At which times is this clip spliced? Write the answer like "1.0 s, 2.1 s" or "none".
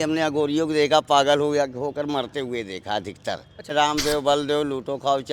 3.7 s